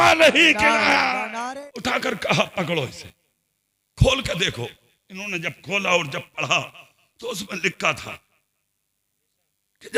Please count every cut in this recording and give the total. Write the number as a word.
one